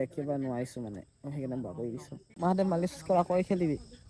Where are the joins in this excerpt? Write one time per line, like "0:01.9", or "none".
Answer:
0:02.3